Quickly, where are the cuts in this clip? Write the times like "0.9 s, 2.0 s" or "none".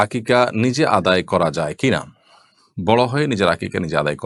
none